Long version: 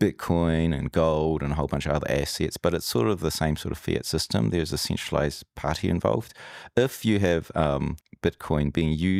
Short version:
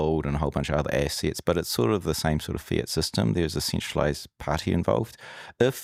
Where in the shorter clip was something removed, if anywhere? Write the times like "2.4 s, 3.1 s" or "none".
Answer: none